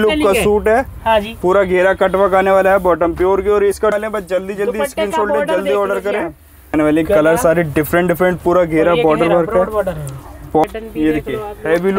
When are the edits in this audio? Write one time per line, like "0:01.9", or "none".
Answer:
0:03.9
0:06.7
0:10.6